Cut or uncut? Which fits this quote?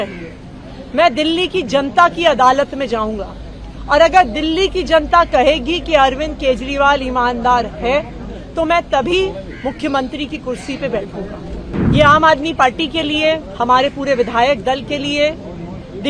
cut